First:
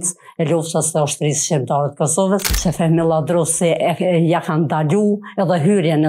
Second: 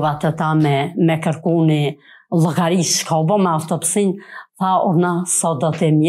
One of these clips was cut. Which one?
first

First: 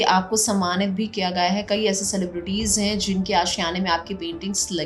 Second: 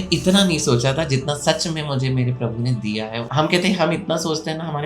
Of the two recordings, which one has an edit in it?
second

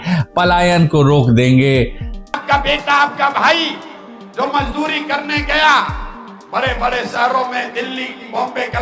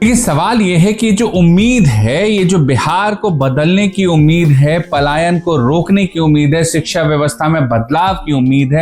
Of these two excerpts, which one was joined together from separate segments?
first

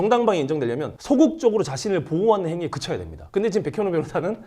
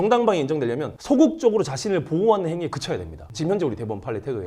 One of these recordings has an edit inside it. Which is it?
first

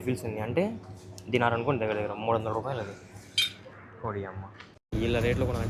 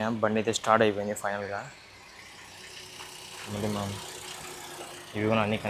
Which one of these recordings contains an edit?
first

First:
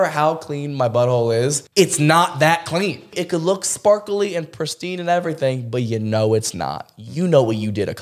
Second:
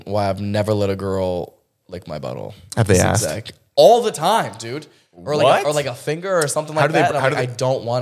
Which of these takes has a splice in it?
first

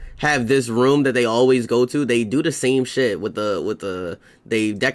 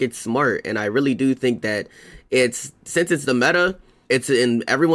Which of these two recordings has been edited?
second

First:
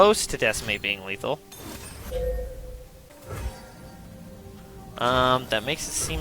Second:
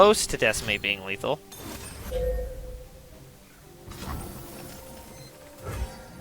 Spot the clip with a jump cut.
first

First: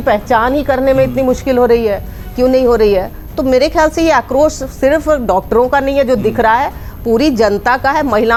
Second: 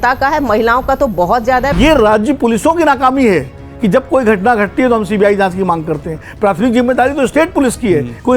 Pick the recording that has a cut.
second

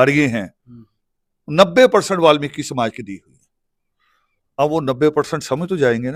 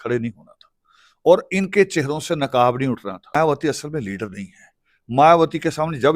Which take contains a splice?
second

